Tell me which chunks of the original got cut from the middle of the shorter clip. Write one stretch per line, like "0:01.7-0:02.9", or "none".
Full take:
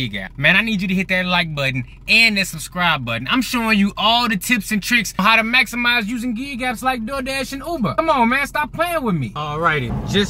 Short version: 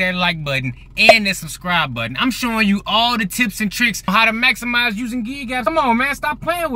0:06.7-0:07.9